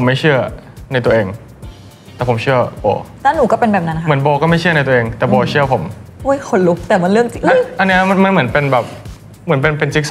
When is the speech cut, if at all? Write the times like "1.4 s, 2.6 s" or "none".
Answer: 3.1 s